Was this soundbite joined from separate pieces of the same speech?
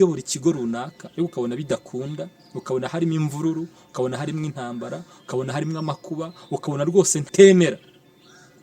yes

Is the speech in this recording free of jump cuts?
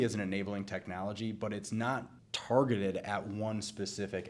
yes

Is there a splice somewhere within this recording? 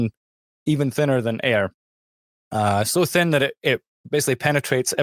no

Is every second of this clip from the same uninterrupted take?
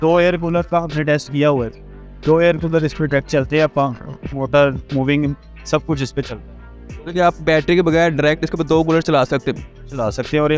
yes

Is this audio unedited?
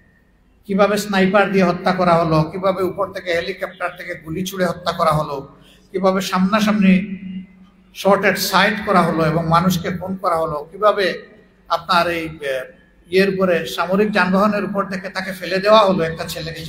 yes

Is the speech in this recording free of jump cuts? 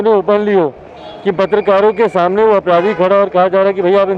yes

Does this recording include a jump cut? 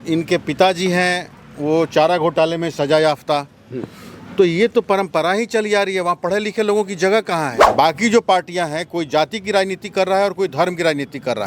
yes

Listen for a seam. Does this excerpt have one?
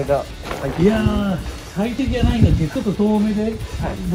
yes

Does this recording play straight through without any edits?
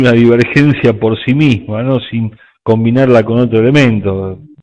no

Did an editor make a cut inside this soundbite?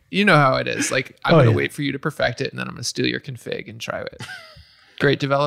yes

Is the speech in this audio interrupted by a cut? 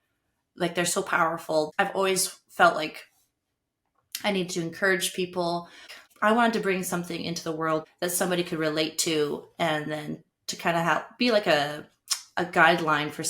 yes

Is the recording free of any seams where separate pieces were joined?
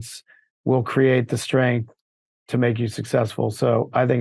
yes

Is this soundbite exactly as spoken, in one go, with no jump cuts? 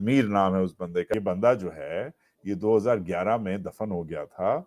no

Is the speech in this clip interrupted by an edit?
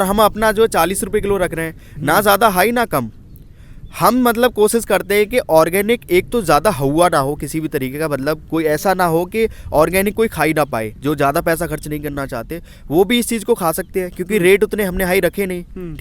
no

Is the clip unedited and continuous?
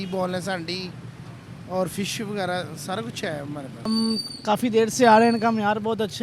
no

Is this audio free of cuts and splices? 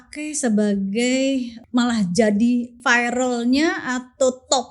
no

